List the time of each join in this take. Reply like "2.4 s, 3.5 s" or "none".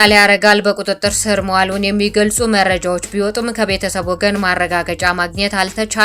none